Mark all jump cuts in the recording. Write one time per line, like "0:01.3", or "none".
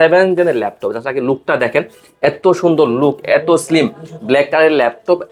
none